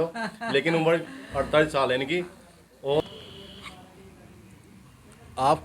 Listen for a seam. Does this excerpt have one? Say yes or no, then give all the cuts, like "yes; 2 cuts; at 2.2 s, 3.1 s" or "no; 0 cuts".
yes; 1 cut; at 3.0 s